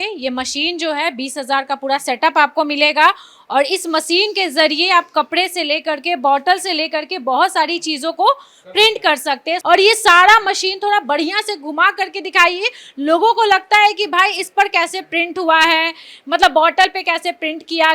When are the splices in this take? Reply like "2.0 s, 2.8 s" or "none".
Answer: none